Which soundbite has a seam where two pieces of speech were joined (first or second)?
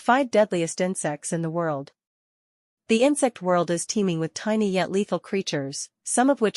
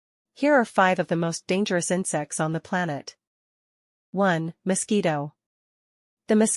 first